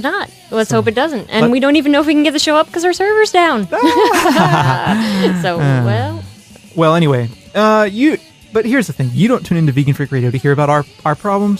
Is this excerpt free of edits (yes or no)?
no